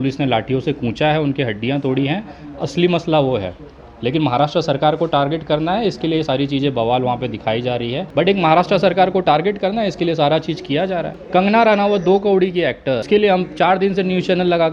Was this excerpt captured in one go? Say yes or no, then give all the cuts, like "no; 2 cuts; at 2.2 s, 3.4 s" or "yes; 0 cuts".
no; 3 cuts; at 8.1 s, 11.2 s, 13.0 s